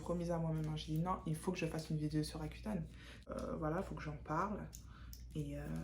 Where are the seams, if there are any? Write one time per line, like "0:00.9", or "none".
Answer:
0:03.3